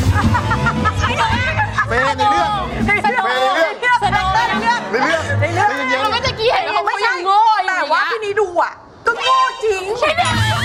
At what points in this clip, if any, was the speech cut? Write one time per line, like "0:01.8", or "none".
none

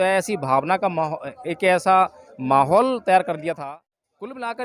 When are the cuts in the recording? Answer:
0:03.6

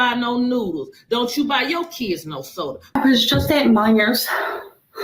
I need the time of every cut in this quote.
0:03.0

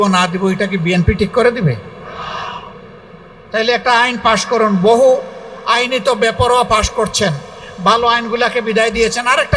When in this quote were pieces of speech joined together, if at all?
none

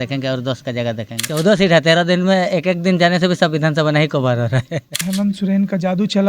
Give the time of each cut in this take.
0:01.2
0:05.0

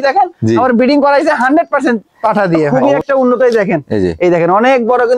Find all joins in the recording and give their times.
0:02.7

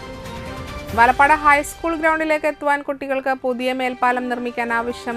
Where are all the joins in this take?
none

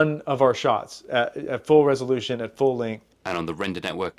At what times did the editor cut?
0:03.1

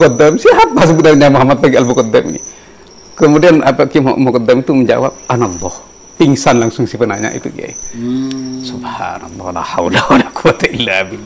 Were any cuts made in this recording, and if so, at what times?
none

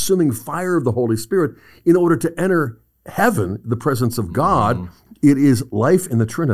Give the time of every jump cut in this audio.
0:05.0

